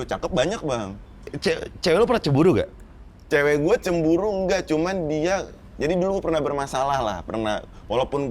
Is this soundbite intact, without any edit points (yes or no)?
no